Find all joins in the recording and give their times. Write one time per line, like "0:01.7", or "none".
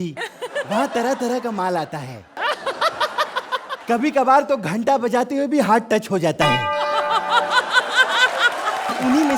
none